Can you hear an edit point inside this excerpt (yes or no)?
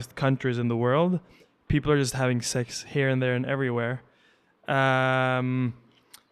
no